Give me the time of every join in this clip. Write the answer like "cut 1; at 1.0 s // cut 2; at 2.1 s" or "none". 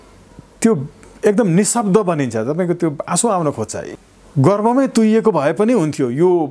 cut 1; at 3.8 s

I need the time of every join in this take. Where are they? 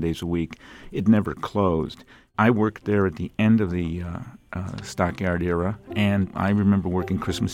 cut 1; at 2.3 s // cut 2; at 6.3 s

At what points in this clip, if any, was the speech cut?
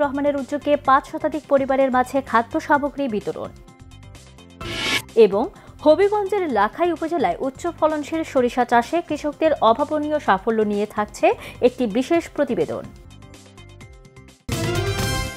cut 1; at 14.4 s

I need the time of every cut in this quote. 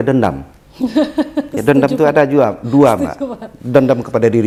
none

